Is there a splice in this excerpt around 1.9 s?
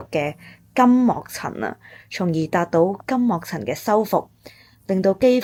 no; 0 cuts

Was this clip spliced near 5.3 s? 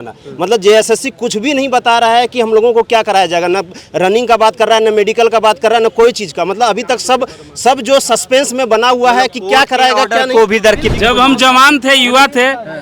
no; 1 cut; at 10.8 s

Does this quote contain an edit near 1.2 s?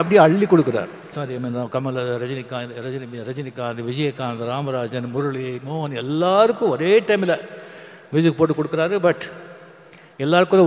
yes; 1 cut; at 1.2 s

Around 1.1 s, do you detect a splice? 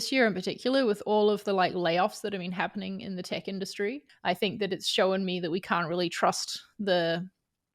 no; 1 cut; at 4.1 s

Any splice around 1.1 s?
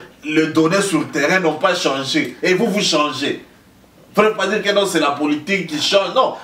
no; 0 cuts

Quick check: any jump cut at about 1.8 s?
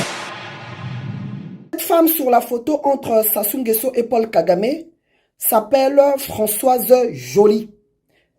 yes; 1 cut; at 1.8 s

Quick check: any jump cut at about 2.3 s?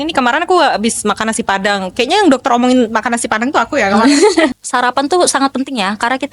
no; 1 cut; at 4.6 s

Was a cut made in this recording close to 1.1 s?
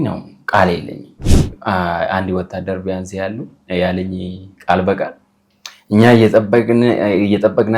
yes; 1 cut; at 1.1 s

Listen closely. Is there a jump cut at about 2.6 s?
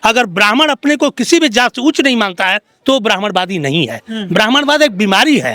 no; 0 cuts

